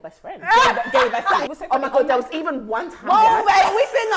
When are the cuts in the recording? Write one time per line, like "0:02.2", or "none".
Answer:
0:01.4

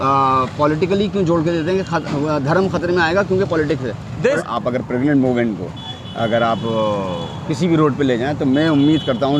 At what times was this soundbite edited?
0:04.4

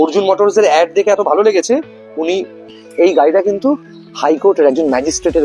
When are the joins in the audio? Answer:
0:02.8

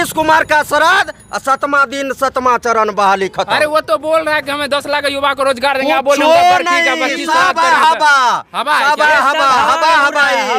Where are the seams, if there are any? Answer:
none

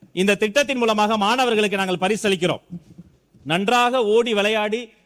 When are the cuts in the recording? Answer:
none

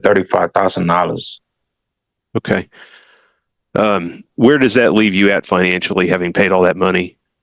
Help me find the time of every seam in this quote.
none

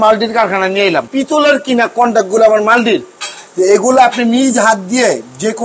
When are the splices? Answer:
0:01.1

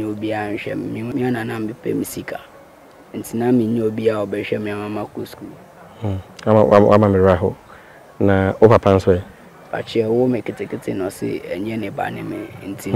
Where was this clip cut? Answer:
0:01.1

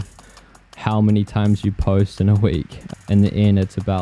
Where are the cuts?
0:02.8

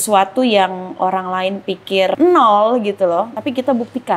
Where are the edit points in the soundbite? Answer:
0:02.1
0:03.4

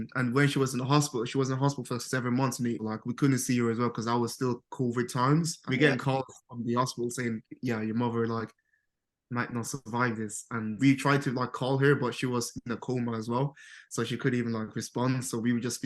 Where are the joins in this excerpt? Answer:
0:02.8
0:05.6
0:10.8

